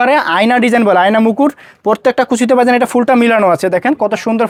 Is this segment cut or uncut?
uncut